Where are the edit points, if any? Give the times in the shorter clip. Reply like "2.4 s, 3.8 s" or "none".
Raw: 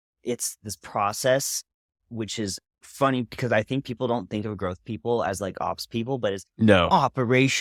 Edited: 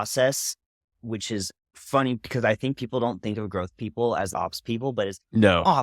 4.3 s